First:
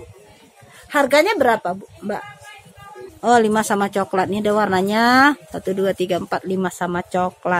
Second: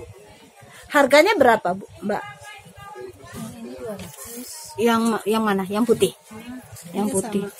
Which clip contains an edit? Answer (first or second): first